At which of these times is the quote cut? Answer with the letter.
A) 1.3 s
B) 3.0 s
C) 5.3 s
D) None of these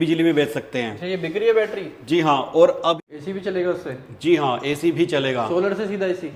B